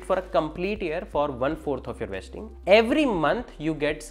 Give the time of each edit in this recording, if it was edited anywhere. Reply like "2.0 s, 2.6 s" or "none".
none